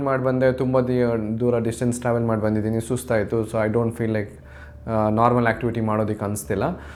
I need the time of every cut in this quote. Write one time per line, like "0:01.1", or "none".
none